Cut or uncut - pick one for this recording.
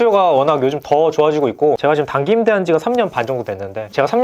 cut